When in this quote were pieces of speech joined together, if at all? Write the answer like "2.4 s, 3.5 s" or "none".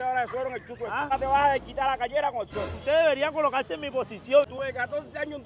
1.1 s, 2.7 s, 4.5 s